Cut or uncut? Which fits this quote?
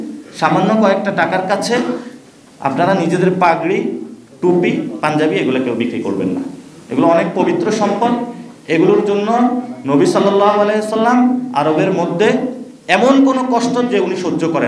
uncut